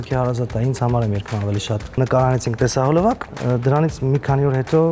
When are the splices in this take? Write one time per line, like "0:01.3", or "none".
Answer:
0:02.0
0:03.3

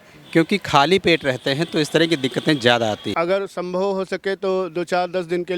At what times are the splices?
0:03.1

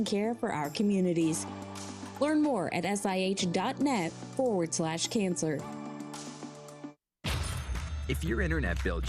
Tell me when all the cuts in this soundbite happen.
0:07.1

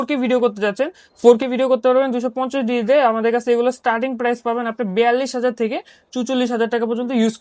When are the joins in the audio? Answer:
none

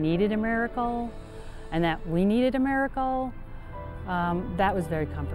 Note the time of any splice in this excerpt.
none

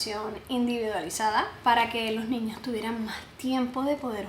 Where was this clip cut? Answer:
0:01.5

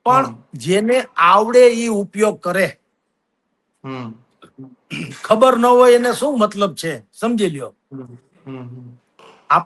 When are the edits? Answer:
none

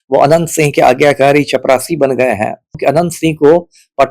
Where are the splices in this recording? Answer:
0:02.8

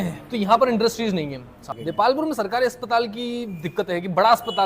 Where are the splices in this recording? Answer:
0:01.7

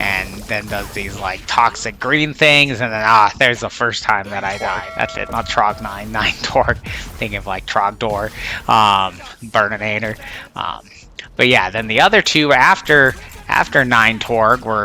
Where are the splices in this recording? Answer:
0:04.6

